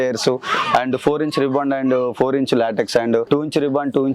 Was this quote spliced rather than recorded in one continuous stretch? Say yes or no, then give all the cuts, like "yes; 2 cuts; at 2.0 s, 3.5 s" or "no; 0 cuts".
yes; 1 cut; at 3.2 s